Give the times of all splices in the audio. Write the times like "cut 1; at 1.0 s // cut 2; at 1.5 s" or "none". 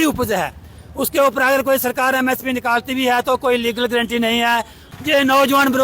cut 1; at 4.9 s